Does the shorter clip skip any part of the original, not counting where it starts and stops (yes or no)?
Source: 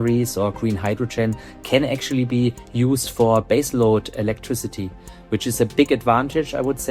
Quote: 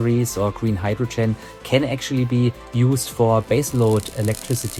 no